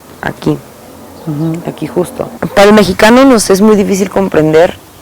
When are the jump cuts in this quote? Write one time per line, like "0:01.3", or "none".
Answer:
0:02.3